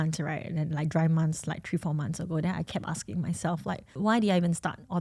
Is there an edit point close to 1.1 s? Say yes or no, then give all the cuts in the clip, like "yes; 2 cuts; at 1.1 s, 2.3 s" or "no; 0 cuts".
no; 1 cut; at 3.9 s